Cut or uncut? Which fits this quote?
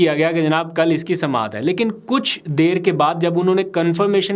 uncut